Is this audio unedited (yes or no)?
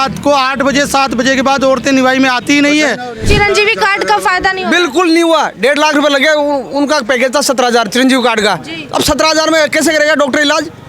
no